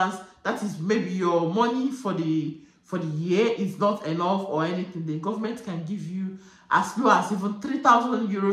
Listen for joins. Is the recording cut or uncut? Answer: uncut